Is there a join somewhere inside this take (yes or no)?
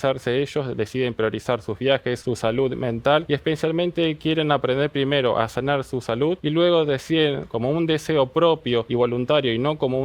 yes